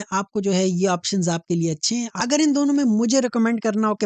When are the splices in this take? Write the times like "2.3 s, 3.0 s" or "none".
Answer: 2.1 s